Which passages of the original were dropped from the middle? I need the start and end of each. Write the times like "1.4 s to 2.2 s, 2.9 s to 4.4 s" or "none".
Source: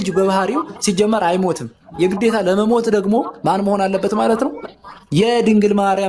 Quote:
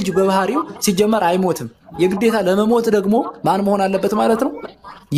none